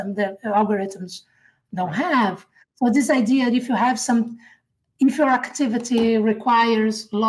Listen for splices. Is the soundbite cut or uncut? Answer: uncut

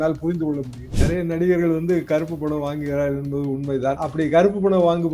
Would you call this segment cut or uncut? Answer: cut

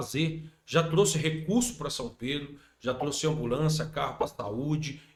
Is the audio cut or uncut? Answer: uncut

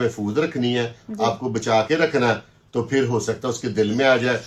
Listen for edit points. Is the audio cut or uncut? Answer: uncut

